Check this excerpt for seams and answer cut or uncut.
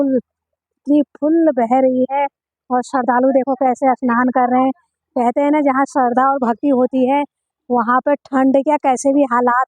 uncut